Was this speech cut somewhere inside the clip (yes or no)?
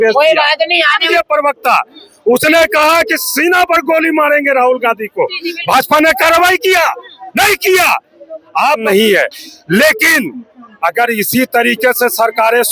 yes